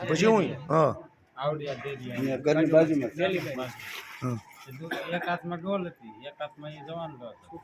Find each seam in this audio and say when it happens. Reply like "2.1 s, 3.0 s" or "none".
none